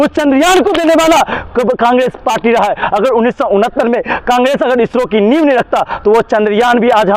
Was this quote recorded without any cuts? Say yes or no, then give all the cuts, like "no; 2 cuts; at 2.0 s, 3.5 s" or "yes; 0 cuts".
yes; 0 cuts